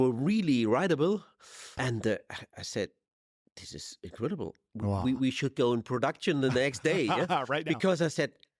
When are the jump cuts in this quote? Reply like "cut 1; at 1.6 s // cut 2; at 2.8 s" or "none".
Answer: cut 1; at 1.7 s